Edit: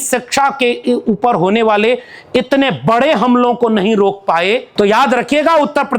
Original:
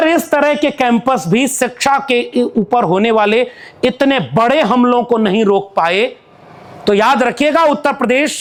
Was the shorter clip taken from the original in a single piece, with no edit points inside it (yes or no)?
no